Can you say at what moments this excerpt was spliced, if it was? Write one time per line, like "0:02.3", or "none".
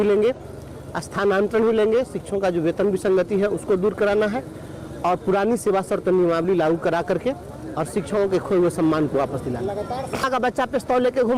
0:10.2